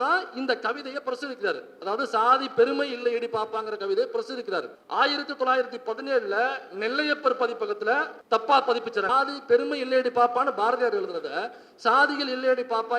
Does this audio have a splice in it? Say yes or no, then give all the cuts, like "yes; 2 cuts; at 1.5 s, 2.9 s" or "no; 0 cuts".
yes; 3 cuts; at 4.8 s, 8.1 s, 9.1 s